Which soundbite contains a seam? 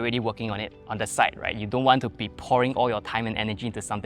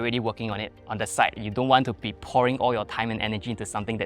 second; 1 cut; at 1.4 s

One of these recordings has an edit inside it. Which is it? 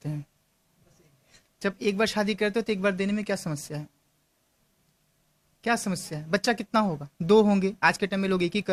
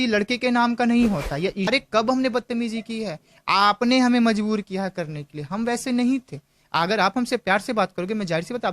second; 1 cut; at 1.7 s

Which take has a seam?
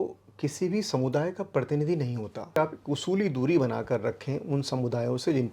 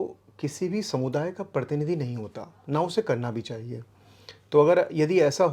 first; 1 cut; at 2.6 s

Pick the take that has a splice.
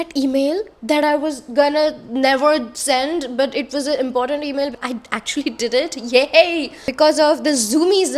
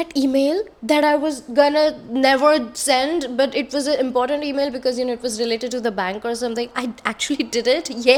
first; 2 cuts; at 4.8 s, 6.8 s

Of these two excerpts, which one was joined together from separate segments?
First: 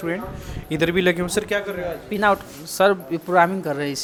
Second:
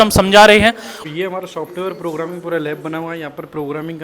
second; 1 cut; at 1.0 s

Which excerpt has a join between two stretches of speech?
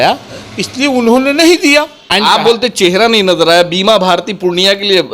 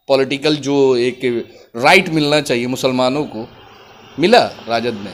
first; 1 cut; at 2.1 s

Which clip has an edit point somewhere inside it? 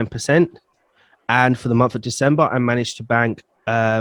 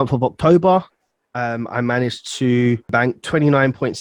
second; 1 cut; at 2.9 s

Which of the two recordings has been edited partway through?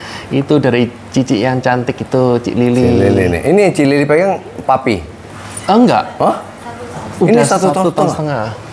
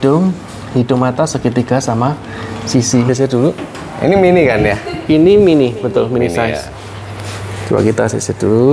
second; 1 cut; at 3.1 s

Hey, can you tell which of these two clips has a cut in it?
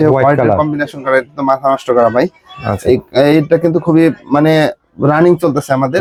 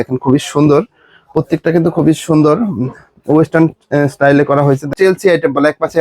second; 1 cut; at 4.9 s

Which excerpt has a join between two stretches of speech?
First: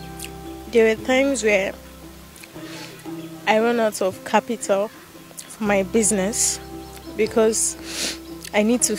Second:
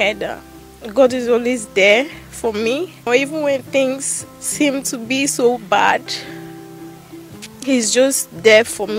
second; 3 cuts; at 3.1 s, 6.0 s, 7.5 s

